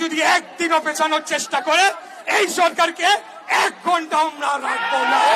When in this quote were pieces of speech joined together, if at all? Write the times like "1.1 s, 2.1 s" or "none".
none